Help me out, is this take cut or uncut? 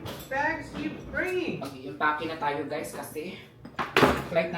uncut